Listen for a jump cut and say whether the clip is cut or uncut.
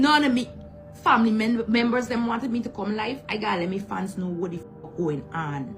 uncut